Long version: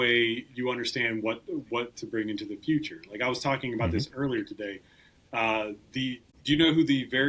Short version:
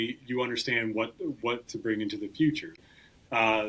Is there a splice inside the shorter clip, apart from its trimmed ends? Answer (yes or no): yes